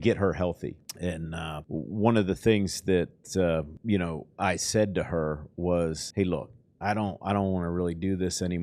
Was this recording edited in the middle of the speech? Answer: yes; 4 cuts; at 0.9 s, 1.6 s, 3.7 s, 6.0 s

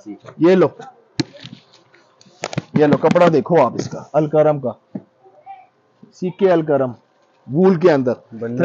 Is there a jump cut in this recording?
no; 0 cuts

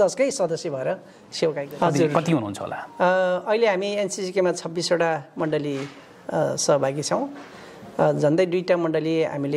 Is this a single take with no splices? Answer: no; 1 cut; at 1.7 s

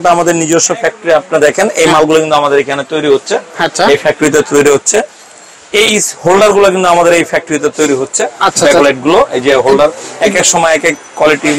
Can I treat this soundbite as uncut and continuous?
yes; 0 cuts

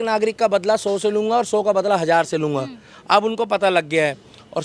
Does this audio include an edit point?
no; 0 cuts

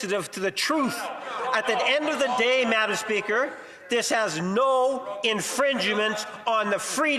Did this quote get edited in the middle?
no; 0 cuts

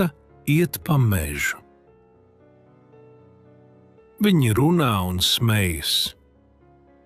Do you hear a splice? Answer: yes; 3 cuts; at 2.3 s, 4.2 s, 6.2 s

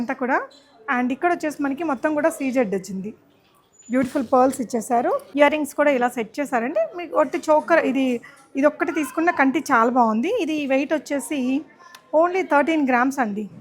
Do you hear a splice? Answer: no; 0 cuts

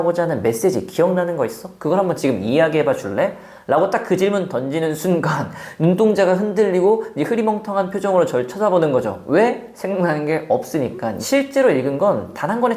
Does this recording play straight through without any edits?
no; 1 cut; at 11.2 s

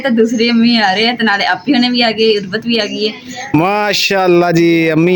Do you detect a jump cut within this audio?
yes; 1 cut; at 3.5 s

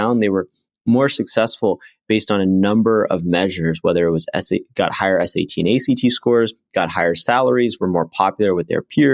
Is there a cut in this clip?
no; 0 cuts

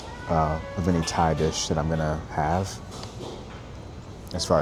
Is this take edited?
no; 0 cuts

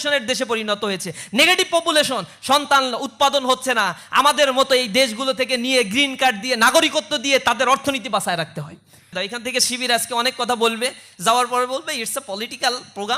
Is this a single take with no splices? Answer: no; 1 cut; at 9.1 s

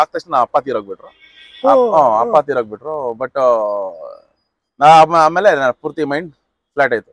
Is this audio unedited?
yes; 0 cuts

